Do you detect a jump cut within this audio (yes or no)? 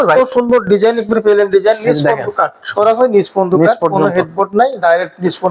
no